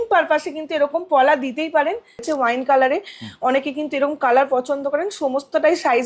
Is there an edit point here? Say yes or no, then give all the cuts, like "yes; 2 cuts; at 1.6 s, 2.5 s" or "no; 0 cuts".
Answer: yes; 1 cut; at 2.2 s